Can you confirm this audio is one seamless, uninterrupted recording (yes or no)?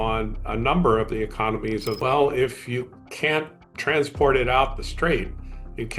no